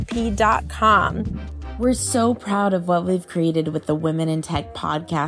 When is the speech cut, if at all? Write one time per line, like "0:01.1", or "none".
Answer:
0:01.6